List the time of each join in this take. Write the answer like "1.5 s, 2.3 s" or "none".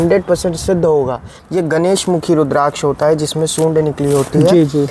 1.4 s